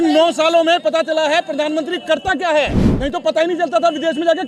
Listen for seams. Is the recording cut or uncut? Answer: uncut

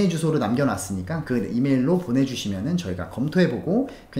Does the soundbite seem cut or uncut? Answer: uncut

